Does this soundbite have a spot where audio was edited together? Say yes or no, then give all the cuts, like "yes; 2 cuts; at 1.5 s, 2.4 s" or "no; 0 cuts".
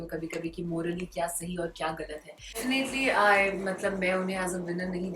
yes; 1 cut; at 2.6 s